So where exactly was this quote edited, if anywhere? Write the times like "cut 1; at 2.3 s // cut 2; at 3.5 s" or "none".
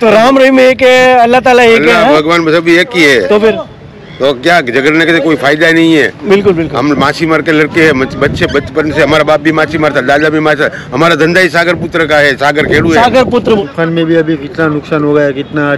cut 1; at 13.4 s